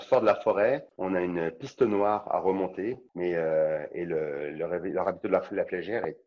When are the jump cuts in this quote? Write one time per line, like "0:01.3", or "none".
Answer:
0:00.9
0:03.0